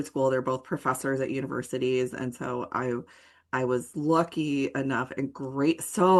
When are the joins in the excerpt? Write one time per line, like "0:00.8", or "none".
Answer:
none